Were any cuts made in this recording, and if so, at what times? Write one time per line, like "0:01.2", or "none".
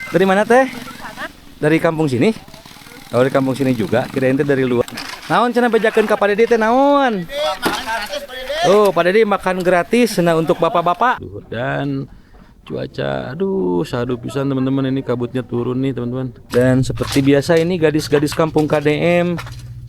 0:04.8
0:11.2
0:16.4